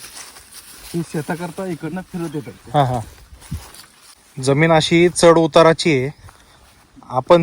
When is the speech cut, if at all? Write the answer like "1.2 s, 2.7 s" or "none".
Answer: 4.3 s

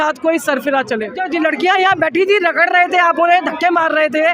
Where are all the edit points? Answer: 1.2 s

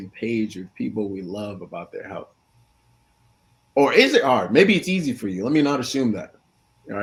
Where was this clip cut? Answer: none

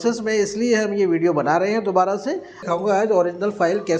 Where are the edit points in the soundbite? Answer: 2.6 s

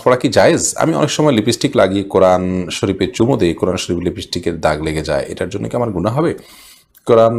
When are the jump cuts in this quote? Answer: none

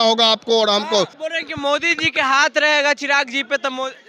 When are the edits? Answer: 1.2 s

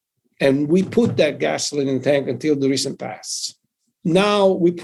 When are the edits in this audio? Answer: none

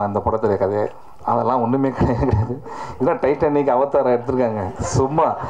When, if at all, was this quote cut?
none

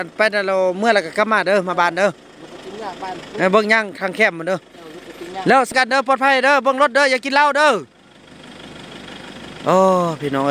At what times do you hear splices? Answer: 5.7 s

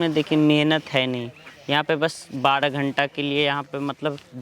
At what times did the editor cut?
none

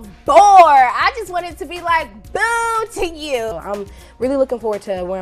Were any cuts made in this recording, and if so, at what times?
3.5 s

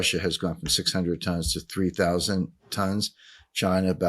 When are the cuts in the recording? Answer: none

